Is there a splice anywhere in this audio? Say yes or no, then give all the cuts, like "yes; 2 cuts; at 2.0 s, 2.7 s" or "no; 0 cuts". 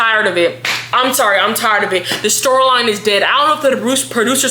no; 0 cuts